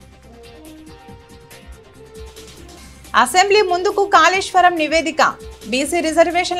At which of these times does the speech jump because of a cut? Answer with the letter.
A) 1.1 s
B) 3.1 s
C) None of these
C